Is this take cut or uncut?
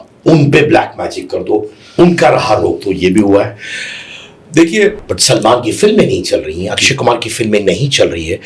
cut